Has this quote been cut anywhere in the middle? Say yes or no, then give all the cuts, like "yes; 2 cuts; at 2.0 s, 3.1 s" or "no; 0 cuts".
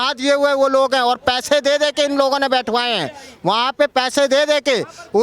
no; 0 cuts